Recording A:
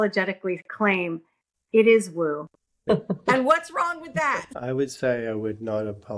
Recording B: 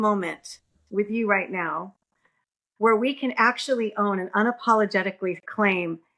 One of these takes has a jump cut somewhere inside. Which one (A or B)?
A